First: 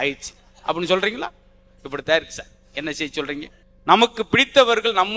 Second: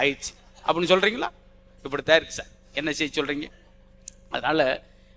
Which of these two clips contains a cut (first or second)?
first